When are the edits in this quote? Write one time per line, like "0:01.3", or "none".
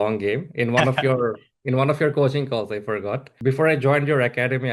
0:03.3